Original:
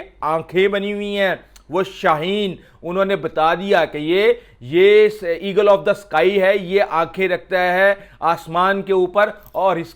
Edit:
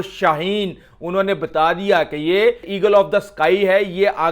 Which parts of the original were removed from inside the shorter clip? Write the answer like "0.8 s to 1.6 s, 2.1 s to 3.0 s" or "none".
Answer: 4.5 s to 5.4 s